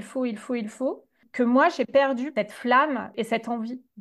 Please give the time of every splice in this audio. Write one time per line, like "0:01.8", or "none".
0:01.2
0:02.3
0:03.1